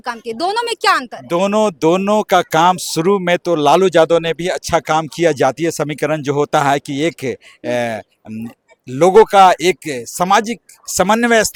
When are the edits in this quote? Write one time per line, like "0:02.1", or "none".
none